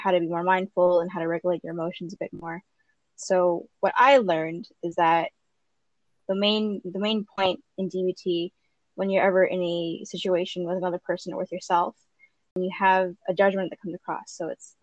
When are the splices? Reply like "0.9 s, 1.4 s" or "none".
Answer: 12.5 s

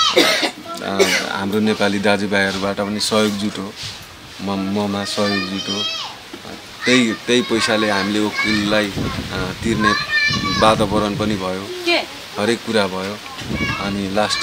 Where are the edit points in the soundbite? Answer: none

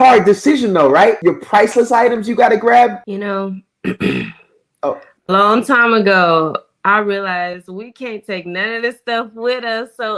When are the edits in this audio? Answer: 1.2 s, 3.0 s

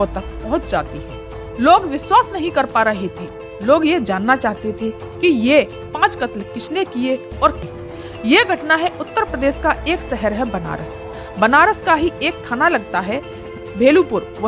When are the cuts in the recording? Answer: 7.6 s

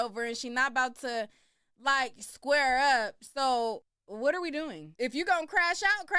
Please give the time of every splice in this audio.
3.9 s, 4.8 s

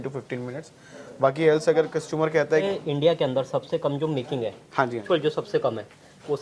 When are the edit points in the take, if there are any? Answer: 2.6 s, 5.0 s

